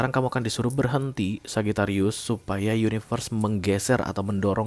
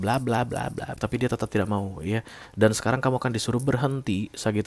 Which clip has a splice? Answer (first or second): second